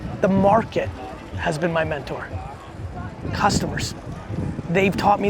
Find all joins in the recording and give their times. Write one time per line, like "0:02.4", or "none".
none